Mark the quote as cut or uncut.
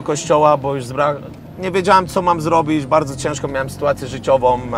uncut